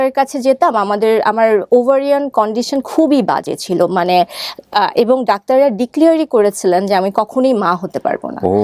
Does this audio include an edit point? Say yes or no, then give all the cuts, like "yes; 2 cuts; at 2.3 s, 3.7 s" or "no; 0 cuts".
no; 0 cuts